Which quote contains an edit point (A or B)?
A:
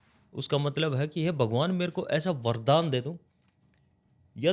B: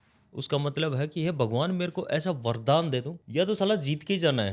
B